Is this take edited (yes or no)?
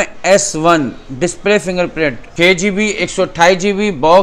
yes